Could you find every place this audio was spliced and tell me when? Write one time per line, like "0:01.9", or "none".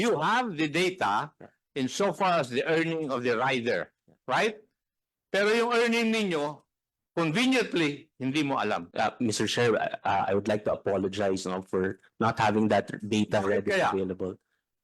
0:08.9